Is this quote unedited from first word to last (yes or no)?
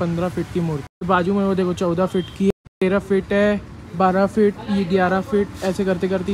no